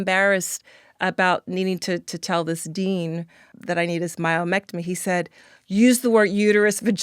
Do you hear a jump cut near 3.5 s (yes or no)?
yes